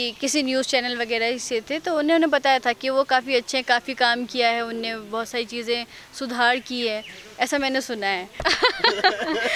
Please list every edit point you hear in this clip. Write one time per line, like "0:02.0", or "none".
0:08.3